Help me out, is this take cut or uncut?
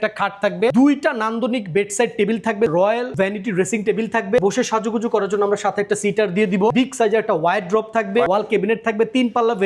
cut